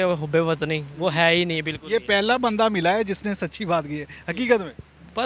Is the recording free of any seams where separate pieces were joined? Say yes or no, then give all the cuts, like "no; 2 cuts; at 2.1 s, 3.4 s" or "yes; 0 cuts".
yes; 0 cuts